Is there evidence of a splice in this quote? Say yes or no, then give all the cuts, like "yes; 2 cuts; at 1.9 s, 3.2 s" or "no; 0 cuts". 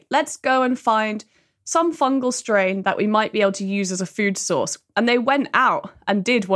no; 0 cuts